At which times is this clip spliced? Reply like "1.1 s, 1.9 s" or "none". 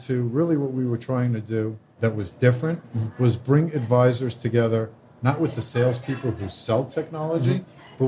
1.8 s